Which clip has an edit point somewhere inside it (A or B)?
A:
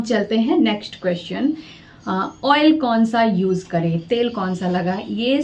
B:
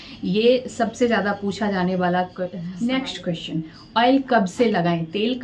B